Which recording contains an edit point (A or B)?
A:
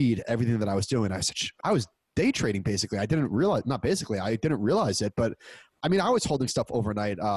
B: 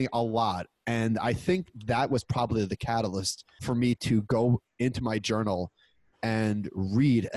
A